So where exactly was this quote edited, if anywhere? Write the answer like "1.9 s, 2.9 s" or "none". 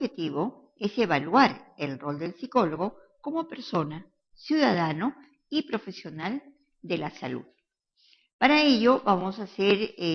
4.6 s